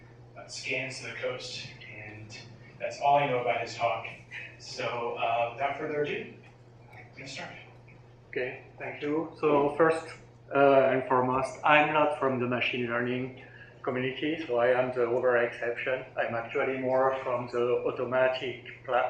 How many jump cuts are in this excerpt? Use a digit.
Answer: 1